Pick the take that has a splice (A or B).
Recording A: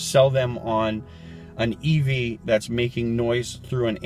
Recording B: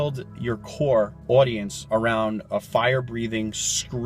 B